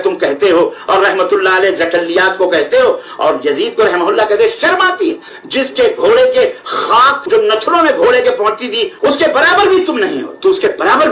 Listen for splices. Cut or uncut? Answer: cut